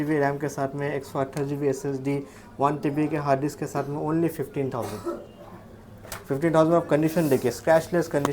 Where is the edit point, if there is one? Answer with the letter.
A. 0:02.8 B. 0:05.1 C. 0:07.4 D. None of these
D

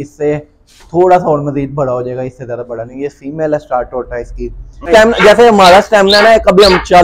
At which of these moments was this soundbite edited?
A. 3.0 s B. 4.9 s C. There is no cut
B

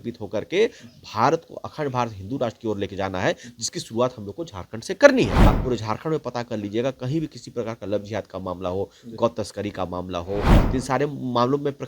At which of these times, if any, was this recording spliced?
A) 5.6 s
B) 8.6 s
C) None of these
A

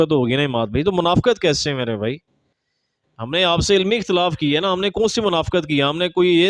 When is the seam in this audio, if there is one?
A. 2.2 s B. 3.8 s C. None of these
C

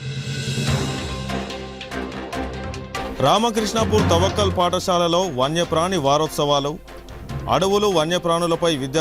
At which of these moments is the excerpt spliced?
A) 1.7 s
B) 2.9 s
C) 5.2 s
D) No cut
A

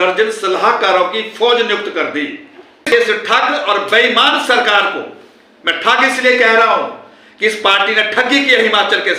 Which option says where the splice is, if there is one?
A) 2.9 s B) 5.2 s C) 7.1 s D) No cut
A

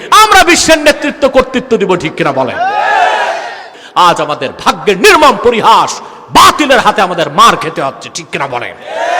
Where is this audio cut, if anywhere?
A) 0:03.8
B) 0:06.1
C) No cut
A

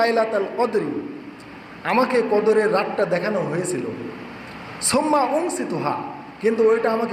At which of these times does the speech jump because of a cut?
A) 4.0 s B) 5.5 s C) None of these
C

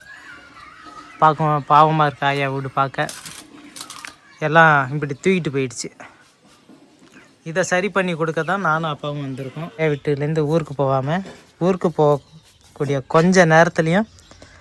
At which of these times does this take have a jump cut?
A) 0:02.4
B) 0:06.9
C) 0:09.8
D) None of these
C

